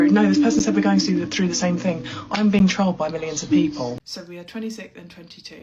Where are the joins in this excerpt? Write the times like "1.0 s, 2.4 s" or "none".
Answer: 3.9 s

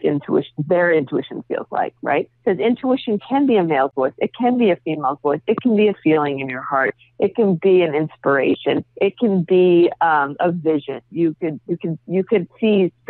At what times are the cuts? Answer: none

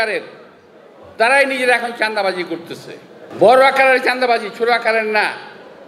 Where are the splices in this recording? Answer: 3.2 s

